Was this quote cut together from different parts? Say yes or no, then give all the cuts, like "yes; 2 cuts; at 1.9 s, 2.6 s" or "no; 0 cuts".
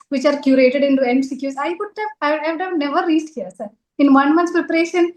no; 0 cuts